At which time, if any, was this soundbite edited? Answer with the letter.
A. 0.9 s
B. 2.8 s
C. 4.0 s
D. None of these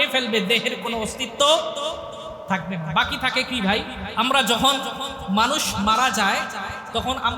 C